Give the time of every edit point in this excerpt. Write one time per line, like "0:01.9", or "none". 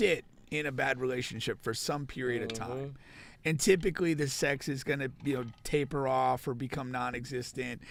none